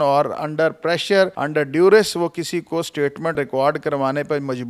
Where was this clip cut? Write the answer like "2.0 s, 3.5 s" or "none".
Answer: 1.4 s, 3.4 s